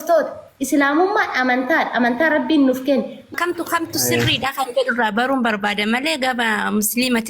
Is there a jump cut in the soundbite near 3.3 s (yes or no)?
yes